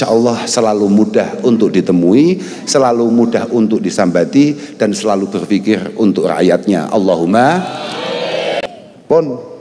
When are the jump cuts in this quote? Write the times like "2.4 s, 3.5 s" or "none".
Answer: 8.6 s